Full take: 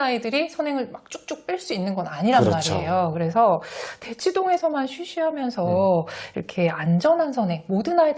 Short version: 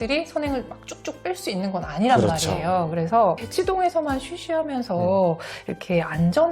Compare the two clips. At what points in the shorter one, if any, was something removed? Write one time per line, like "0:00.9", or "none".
0:03.4